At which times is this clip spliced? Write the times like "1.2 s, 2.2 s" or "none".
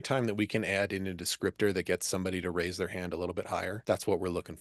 none